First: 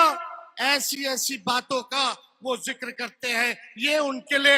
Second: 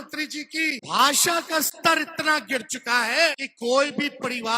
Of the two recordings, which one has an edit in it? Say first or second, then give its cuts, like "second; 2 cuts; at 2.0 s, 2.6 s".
second; 2 cuts; at 0.8 s, 3.5 s